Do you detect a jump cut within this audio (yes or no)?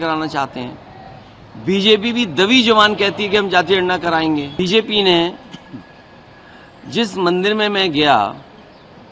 yes